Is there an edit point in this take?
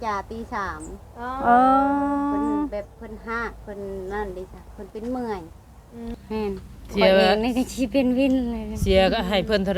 yes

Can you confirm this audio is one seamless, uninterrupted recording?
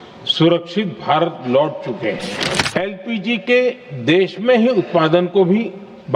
no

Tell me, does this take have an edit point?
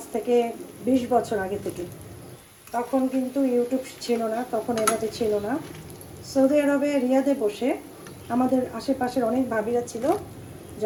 no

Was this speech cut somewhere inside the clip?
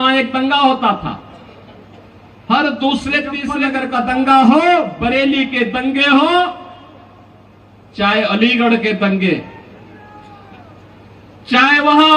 yes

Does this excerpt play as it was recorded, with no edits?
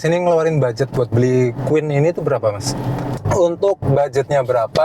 no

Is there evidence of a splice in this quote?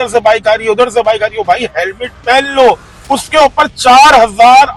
no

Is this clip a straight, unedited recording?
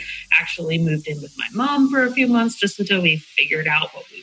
yes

